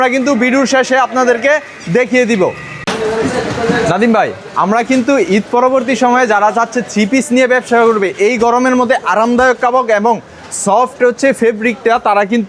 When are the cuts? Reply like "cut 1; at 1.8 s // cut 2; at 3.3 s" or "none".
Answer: none

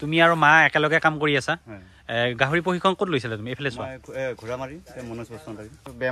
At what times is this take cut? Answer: none

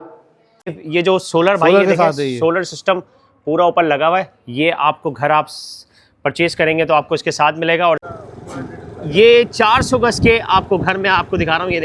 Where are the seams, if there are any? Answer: cut 1; at 0.8 s // cut 2; at 8.1 s

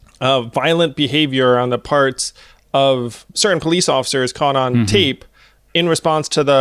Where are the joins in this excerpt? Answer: cut 1; at 3.3 s // cut 2; at 5.6 s

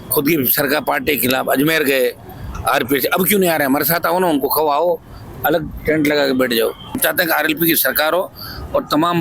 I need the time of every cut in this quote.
cut 1; at 7.0 s

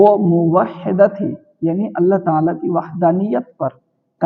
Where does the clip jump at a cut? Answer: none

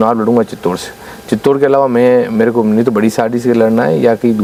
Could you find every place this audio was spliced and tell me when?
none

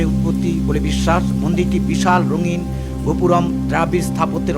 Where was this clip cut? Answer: none

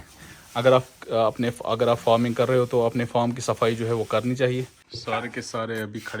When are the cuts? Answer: cut 1; at 4.9 s

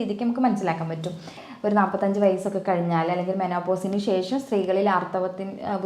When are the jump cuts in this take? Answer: cut 1; at 1.5 s

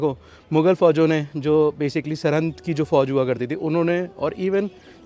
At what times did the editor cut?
none

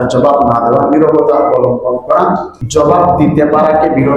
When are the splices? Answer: cut 1; at 2.6 s

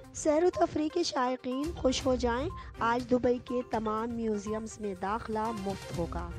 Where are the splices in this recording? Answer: none

